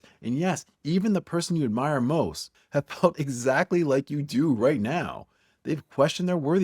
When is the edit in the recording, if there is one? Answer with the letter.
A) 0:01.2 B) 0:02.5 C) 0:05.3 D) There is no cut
B